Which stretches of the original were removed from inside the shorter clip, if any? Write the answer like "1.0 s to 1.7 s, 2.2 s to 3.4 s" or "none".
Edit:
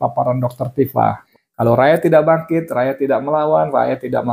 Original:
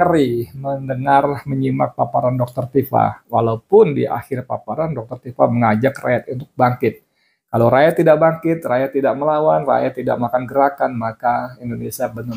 3.2 s to 7.2 s